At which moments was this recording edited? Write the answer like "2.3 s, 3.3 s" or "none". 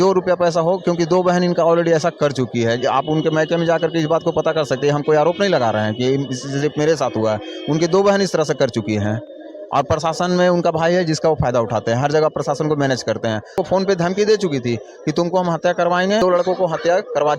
13.5 s, 16.2 s